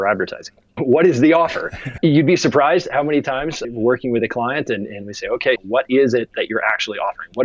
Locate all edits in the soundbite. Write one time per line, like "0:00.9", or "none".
0:00.8
0:01.8
0:03.6
0:05.6